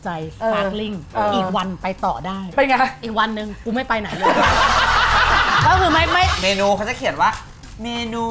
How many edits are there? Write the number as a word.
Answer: two